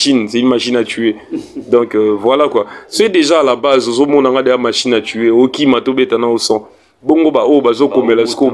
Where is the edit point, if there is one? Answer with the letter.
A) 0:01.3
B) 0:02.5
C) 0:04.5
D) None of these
D